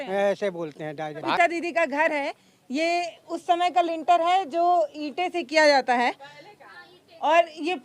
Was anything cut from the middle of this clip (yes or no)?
yes